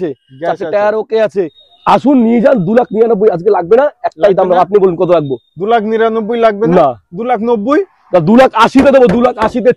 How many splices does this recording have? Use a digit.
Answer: 1